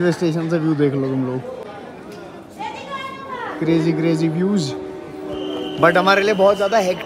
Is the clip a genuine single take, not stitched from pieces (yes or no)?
yes